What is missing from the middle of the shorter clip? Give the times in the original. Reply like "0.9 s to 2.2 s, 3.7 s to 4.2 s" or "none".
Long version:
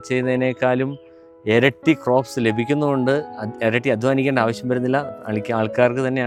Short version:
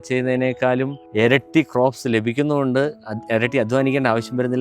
1.0 s to 1.3 s